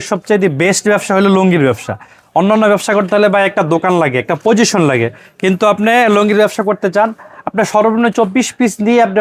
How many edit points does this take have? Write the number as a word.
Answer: zero